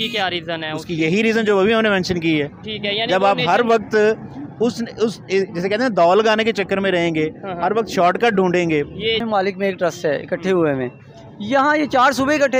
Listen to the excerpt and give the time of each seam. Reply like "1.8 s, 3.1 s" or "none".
9.2 s